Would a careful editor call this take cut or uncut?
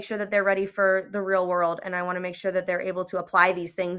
uncut